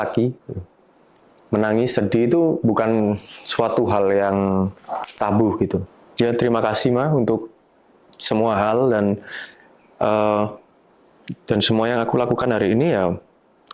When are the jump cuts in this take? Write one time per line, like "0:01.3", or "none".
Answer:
0:05.9